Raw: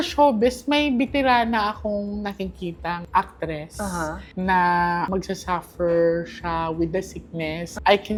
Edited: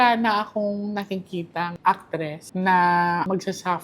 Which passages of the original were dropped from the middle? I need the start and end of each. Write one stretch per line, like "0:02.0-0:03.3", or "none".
0:03.7-0:04.2